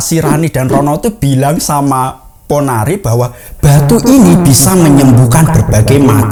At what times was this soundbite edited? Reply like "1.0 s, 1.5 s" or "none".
none